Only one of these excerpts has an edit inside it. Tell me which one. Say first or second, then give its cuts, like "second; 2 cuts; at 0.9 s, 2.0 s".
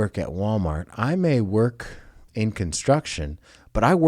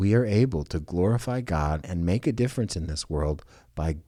first; 1 cut; at 2.2 s